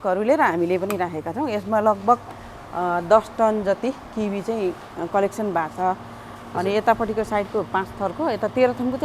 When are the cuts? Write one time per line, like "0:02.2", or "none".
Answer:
none